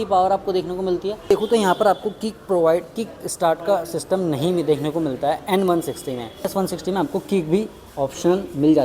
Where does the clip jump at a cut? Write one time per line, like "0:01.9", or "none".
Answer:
0:01.3
0:06.5

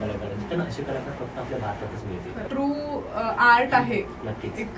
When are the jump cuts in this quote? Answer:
0:02.4

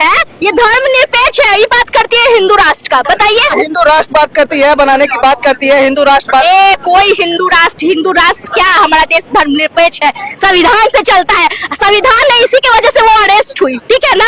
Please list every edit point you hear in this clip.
0:03.5

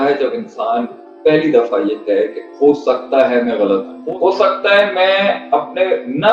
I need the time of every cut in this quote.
0:03.9

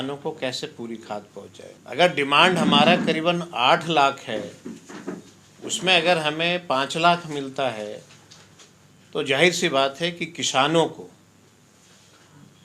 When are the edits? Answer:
0:01.8

